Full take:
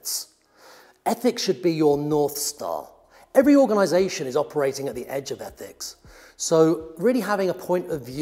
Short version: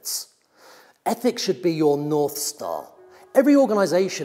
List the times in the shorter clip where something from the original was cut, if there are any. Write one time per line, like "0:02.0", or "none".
none